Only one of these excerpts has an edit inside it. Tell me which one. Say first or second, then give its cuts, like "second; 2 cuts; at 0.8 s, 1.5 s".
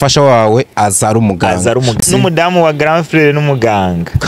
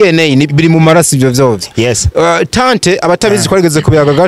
first; 1 cut; at 2.0 s